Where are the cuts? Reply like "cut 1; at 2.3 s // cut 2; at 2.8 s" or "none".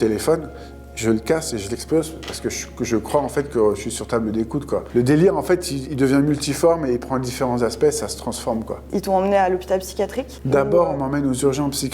none